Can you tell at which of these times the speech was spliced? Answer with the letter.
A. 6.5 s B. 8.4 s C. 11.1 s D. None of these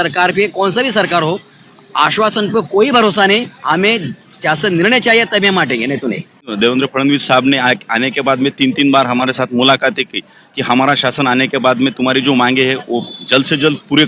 A